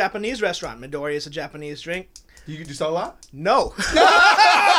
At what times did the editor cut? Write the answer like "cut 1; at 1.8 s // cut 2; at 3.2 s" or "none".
none